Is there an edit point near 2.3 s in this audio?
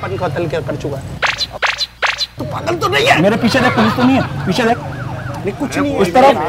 yes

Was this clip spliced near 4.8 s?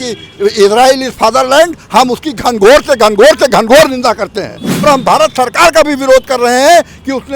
yes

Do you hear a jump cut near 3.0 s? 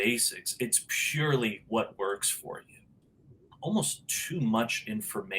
yes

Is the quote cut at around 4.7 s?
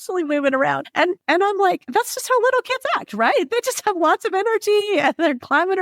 no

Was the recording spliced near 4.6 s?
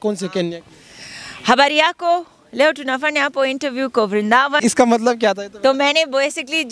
yes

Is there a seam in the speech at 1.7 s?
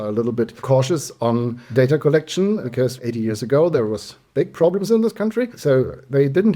no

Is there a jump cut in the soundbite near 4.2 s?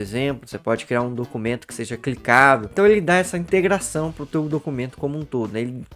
no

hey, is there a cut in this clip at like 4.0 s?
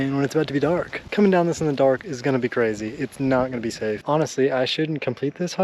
yes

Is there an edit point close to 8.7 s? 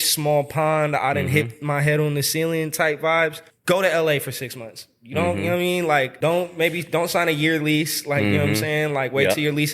no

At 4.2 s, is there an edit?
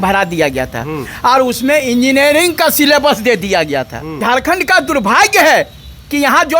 yes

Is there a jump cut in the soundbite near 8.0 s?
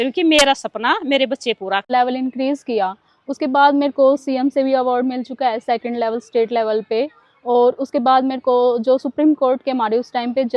no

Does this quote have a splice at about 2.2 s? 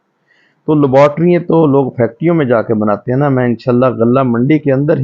no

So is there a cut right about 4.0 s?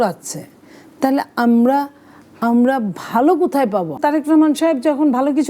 yes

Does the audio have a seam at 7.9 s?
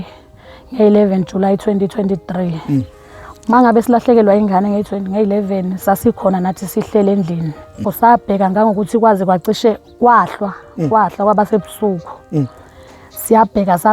yes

